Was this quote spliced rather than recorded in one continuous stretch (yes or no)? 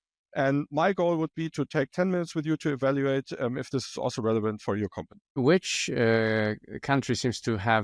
yes